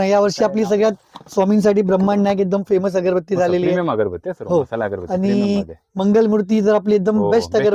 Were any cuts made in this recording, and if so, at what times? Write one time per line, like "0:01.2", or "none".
none